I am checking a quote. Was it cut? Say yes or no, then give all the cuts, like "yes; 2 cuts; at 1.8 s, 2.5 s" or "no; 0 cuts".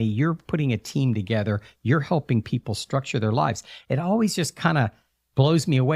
no; 0 cuts